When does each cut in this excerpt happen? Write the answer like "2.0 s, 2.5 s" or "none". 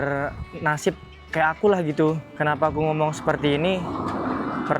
2.3 s